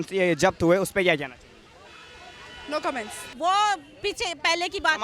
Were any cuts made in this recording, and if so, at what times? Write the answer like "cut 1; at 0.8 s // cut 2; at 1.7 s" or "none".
cut 1; at 3.3 s